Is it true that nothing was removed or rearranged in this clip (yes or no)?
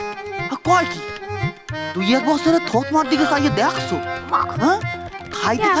yes